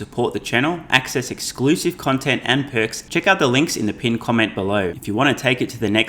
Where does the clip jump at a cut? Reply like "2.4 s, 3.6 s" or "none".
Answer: 3.0 s, 5.0 s